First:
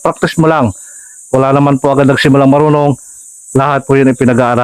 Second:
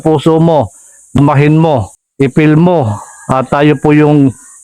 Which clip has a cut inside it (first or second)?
second